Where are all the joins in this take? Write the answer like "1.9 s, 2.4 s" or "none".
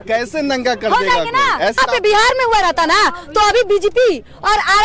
1.8 s